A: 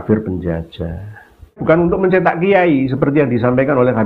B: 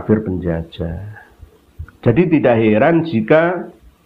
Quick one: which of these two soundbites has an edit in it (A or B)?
A